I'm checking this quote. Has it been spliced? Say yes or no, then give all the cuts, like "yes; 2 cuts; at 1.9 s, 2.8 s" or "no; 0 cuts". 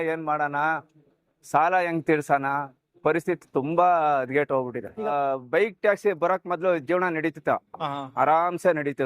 yes; 1 cut; at 5.1 s